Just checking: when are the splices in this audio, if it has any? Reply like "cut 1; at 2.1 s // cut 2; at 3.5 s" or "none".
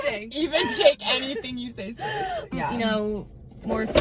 cut 1; at 2.5 s